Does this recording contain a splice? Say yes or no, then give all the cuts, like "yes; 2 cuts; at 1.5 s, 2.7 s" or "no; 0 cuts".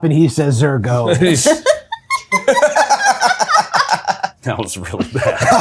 yes; 1 cut; at 4.3 s